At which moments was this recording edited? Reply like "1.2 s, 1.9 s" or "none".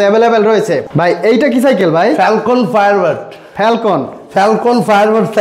none